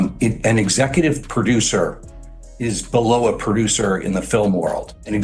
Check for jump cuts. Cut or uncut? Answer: uncut